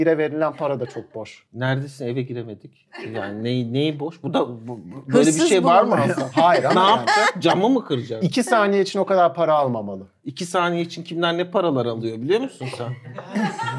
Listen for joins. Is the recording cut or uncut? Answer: uncut